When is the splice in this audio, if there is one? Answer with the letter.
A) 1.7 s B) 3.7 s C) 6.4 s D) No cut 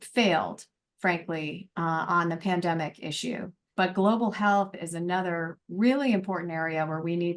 B